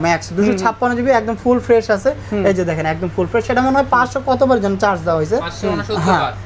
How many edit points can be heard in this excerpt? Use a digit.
0